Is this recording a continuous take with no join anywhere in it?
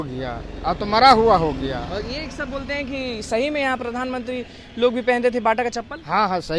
yes; 0 cuts

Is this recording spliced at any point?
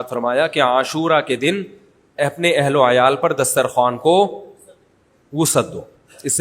no; 0 cuts

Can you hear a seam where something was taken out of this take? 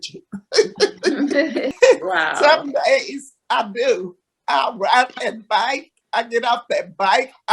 yes; 1 cut; at 1.7 s

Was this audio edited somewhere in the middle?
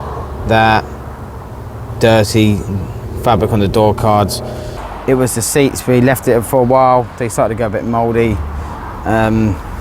yes; 1 cut; at 4.8 s

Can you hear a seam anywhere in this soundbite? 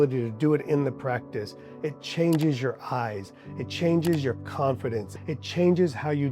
yes; 1 cut; at 5.1 s

